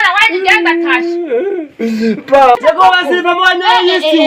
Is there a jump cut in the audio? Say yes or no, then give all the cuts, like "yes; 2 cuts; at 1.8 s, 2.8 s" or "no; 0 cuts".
yes; 1 cut; at 2.6 s